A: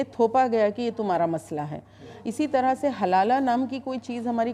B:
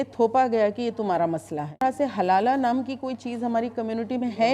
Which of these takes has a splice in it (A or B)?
B